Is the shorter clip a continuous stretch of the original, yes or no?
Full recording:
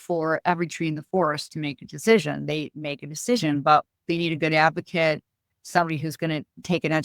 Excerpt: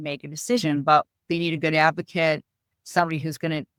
yes